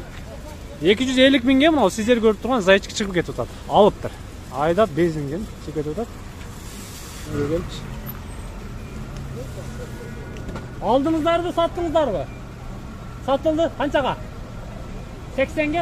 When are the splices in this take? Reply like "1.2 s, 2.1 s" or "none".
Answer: 7.3 s

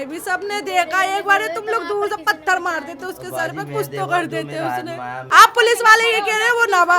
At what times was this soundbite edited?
5.2 s

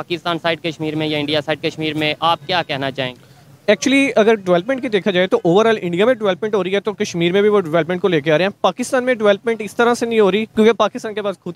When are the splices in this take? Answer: 10.5 s

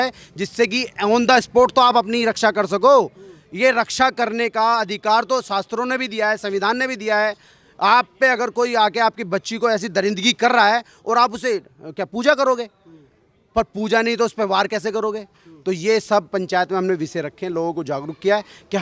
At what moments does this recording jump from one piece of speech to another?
none

